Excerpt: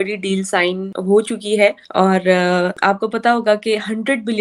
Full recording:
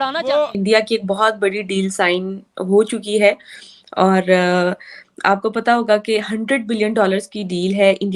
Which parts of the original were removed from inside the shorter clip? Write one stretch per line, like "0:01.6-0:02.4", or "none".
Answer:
0:02.4-0:02.5
0:03.5-0:03.9
0:04.8-0:05.2